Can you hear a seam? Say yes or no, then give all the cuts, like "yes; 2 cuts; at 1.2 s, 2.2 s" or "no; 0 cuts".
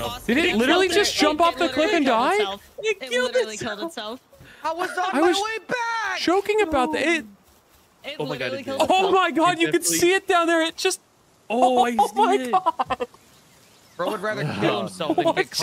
no; 0 cuts